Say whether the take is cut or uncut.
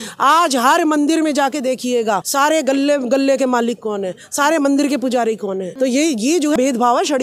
cut